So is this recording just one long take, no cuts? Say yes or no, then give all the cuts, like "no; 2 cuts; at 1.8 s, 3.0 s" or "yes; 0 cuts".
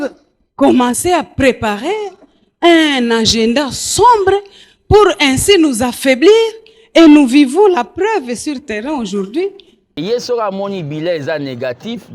no; 1 cut; at 9.9 s